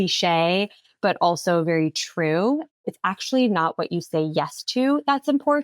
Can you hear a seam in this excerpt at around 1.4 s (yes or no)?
no